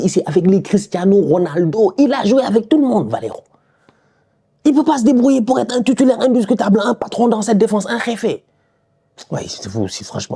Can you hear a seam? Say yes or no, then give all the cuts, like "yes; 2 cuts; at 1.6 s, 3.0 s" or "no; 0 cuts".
no; 0 cuts